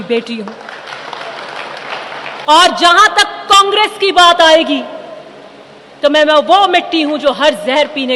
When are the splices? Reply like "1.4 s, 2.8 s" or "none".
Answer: 2.4 s